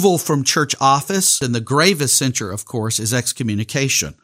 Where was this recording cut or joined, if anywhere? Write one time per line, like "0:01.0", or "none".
0:01.4